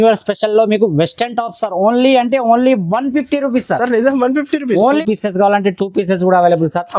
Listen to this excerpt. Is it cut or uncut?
cut